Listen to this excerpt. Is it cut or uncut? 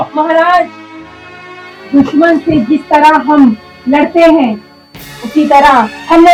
uncut